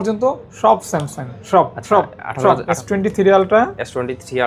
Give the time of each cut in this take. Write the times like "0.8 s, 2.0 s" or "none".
2.8 s